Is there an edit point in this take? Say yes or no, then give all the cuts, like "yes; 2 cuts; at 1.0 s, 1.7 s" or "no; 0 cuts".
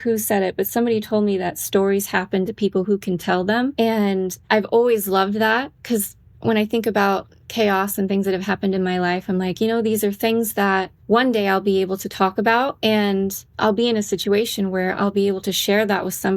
yes; 4 cuts; at 3.7 s, 10.9 s, 12.8 s, 13.4 s